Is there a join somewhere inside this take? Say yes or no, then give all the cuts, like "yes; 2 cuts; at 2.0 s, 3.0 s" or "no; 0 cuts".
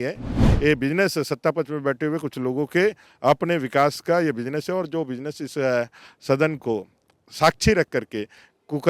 no; 0 cuts